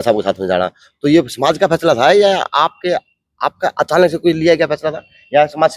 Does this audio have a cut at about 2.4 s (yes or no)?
no